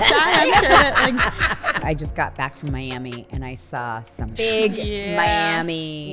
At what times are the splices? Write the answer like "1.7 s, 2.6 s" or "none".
1.8 s, 4.4 s

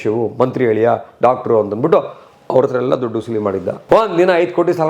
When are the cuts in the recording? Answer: 3.8 s

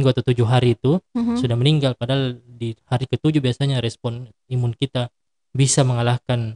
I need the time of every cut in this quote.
none

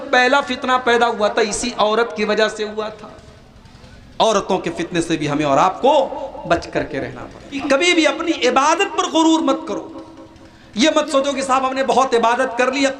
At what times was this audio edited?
7.6 s

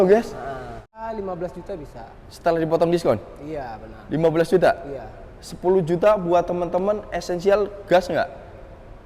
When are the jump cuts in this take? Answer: 1.0 s

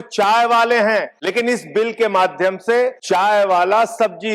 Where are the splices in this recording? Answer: 1.2 s, 3.0 s

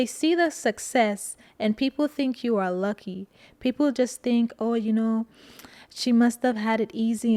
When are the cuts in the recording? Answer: none

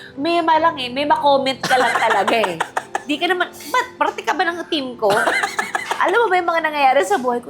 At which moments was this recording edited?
none

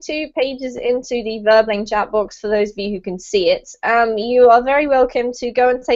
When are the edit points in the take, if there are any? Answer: 3.2 s

